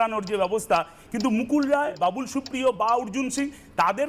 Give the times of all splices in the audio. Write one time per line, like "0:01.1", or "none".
0:00.9
0:01.9